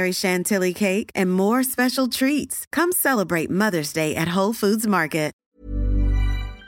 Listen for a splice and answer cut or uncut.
cut